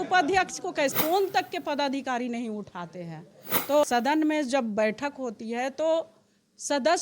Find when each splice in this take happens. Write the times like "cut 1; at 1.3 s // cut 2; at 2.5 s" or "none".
cut 1; at 0.9 s // cut 2; at 3.8 s

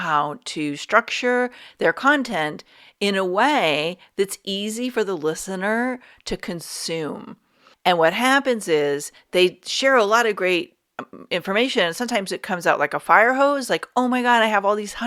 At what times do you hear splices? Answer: none

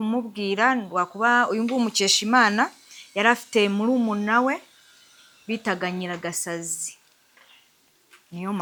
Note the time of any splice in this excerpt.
none

